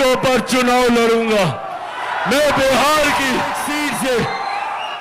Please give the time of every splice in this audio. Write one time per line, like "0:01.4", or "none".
0:03.6